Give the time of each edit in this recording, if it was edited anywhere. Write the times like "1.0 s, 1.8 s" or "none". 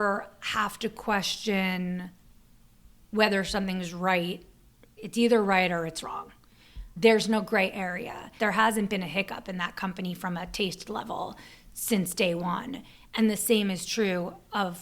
4.9 s, 8.2 s